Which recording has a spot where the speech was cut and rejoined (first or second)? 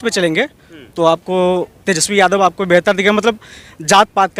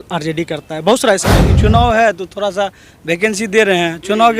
second